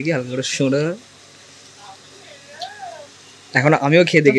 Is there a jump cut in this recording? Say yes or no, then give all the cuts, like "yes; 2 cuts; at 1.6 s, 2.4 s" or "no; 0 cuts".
no; 0 cuts